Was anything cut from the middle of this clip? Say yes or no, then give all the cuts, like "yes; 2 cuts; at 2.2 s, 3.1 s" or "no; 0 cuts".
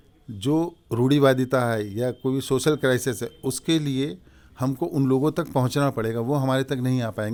no; 0 cuts